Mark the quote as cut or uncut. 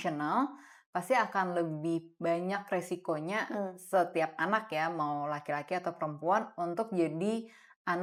uncut